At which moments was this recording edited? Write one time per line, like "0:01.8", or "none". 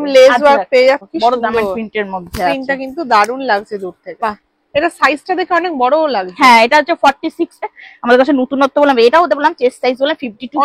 0:01.0
0:04.2
0:07.6